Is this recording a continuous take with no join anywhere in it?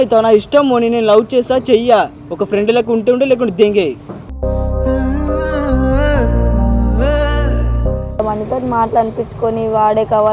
no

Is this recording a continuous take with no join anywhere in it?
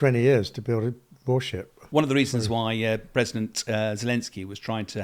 yes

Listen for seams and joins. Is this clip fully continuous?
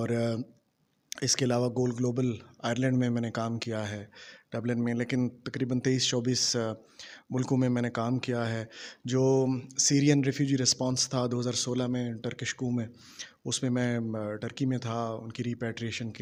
yes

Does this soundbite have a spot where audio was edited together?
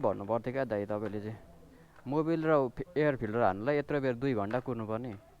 no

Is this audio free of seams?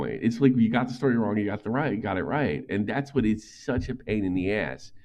yes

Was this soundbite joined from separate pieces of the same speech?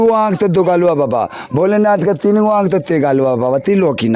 no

